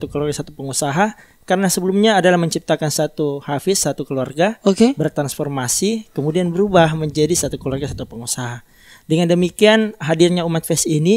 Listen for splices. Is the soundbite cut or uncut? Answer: uncut